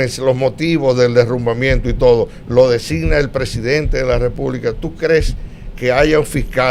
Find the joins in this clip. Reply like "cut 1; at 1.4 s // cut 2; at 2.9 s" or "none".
none

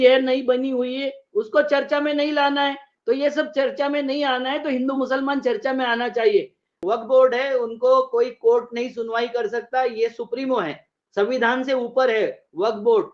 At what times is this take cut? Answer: cut 1; at 6.8 s

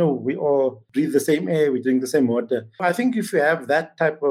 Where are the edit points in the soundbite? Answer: cut 1; at 2.8 s

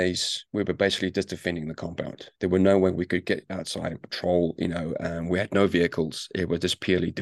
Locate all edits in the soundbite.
none

